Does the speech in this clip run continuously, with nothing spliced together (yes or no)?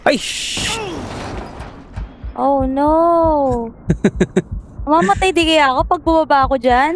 yes